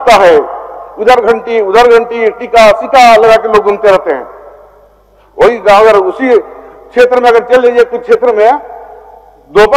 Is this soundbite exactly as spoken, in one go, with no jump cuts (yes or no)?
yes